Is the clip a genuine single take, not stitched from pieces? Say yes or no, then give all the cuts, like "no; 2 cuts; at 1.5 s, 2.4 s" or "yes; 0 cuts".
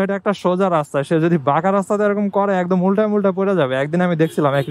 yes; 0 cuts